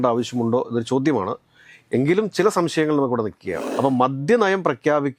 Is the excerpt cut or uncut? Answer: cut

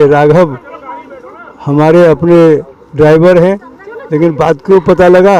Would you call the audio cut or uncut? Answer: uncut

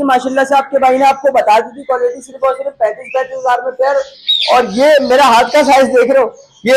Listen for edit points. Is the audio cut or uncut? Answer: uncut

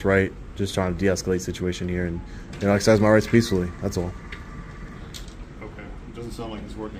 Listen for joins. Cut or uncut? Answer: uncut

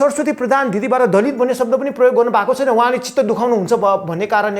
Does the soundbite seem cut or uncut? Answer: uncut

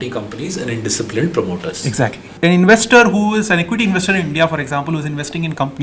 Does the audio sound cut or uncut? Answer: cut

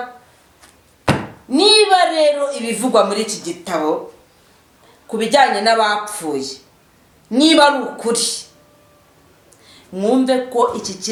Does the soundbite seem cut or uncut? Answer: uncut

